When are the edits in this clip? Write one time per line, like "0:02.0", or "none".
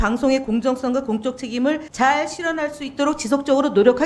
0:01.9